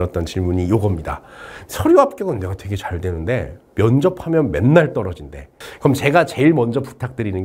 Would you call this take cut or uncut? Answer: cut